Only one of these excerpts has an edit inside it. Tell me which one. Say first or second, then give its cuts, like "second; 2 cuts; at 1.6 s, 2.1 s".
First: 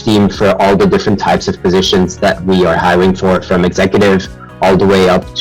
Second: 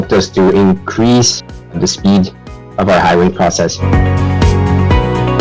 second; 1 cut; at 3.8 s